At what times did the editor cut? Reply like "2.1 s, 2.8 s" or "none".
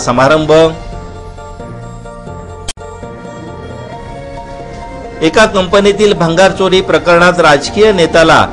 none